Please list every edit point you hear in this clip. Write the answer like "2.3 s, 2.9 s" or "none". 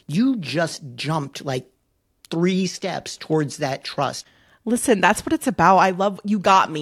4.2 s